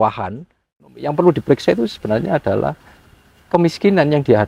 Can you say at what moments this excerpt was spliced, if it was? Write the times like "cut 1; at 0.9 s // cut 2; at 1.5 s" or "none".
cut 1; at 1.0 s